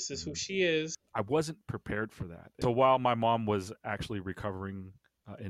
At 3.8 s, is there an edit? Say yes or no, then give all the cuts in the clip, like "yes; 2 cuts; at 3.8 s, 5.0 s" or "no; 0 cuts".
no; 2 cuts; at 1.0 s, 2.5 s